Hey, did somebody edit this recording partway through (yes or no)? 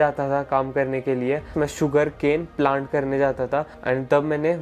no